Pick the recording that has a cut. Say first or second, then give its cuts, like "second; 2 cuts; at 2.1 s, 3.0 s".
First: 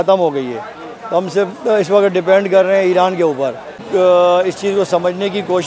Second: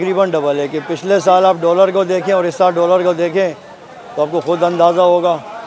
first; 1 cut; at 3.8 s